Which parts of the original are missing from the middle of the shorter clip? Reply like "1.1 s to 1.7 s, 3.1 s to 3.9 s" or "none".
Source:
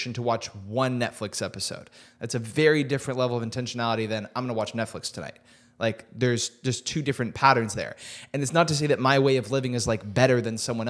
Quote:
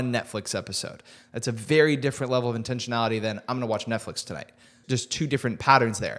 5.6 s to 6.5 s